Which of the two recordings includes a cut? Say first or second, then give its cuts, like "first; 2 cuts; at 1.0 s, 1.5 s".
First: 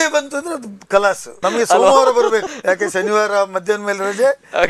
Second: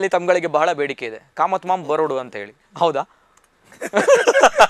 first; 2 cuts; at 1.3 s, 2.5 s